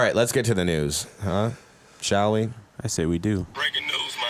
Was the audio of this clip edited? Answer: no; 0 cuts

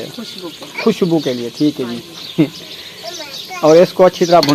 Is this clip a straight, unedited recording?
yes; 0 cuts

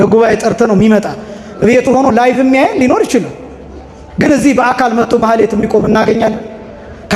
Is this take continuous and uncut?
yes; 0 cuts

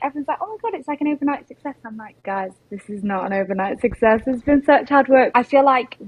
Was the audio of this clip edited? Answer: yes; 2 cuts; at 2.1 s, 5.3 s

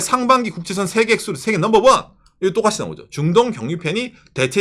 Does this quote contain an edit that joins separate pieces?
no; 0 cuts

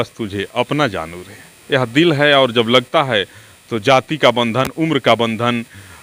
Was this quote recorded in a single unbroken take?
yes; 0 cuts

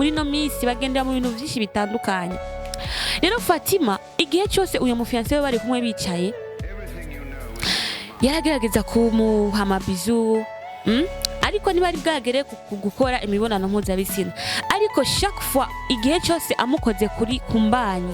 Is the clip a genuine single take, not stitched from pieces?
yes; 0 cuts

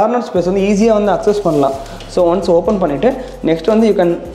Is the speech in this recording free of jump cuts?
yes; 0 cuts

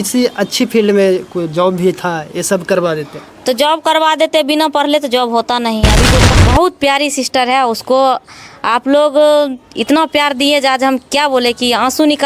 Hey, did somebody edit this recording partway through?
yes; 1 cut; at 6.2 s

